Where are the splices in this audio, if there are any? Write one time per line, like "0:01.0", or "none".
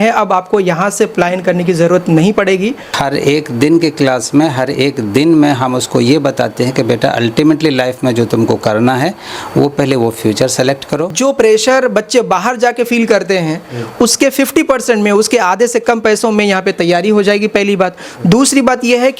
0:02.9
0:11.1